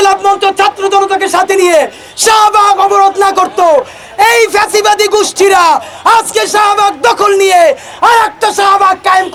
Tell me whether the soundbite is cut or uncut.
uncut